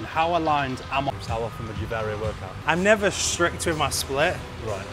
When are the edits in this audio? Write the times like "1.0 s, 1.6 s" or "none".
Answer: 1.1 s, 2.5 s

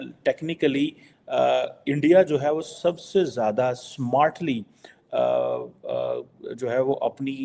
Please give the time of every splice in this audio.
none

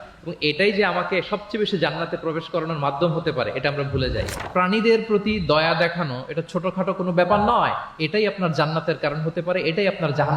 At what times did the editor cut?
4.4 s

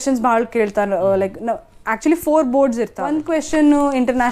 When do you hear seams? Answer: 3.1 s

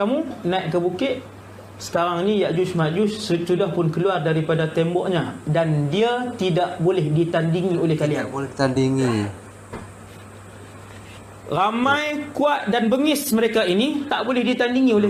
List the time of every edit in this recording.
none

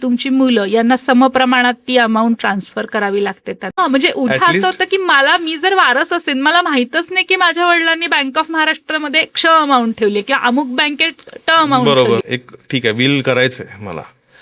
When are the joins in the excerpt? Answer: 3.8 s, 12.4 s

